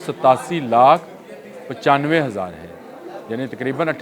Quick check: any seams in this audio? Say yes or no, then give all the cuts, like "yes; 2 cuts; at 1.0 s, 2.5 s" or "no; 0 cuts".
no; 0 cuts